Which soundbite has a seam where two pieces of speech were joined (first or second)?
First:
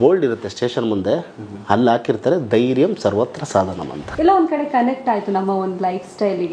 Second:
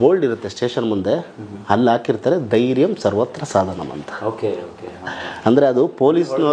first